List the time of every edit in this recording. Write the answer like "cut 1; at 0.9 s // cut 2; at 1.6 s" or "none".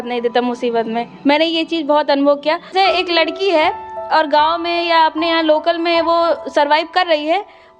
cut 1; at 2.7 s